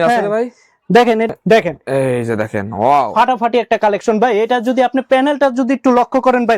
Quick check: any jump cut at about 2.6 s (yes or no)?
no